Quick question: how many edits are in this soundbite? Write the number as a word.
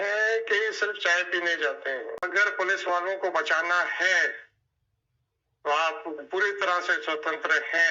one